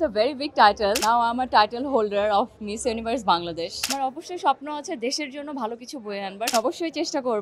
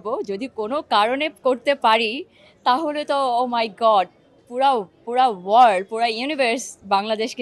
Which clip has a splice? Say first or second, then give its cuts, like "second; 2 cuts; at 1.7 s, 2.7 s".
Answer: first; 3 cuts; at 1.0 s, 3.9 s, 6.5 s